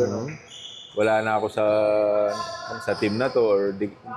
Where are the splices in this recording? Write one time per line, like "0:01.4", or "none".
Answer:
none